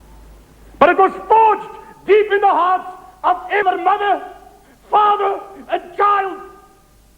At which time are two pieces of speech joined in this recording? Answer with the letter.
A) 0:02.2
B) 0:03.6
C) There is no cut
B